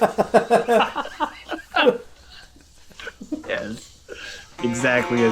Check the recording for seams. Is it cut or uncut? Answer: cut